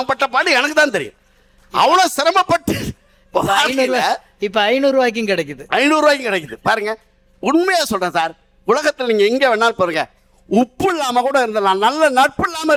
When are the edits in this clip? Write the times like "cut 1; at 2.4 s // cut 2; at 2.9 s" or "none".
none